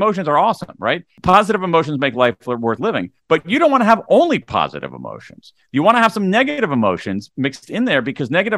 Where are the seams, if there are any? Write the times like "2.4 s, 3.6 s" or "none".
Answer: 1.1 s